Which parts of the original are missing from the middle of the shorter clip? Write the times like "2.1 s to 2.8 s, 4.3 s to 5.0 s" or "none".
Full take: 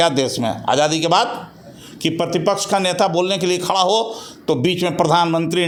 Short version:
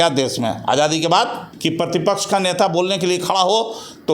1.4 s to 1.8 s